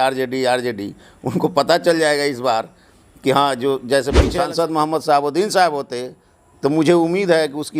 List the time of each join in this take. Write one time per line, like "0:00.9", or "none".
0:04.2